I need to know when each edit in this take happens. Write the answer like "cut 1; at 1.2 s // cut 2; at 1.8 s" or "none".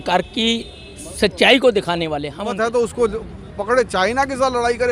cut 1; at 2.5 s